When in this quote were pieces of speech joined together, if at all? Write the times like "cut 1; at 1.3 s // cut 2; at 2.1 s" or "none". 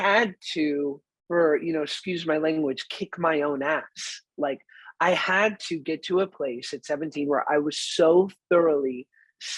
cut 1; at 1.1 s